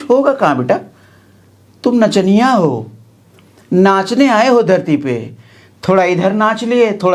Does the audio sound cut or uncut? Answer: uncut